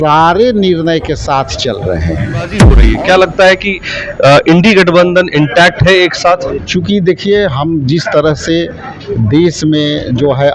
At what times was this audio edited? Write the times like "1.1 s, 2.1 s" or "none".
2.8 s, 6.6 s